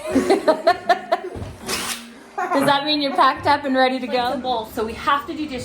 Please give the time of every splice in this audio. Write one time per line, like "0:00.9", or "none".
0:04.4